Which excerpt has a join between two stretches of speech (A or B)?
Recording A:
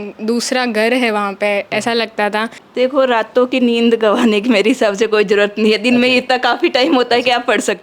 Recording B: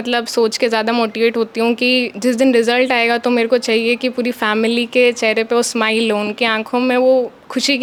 A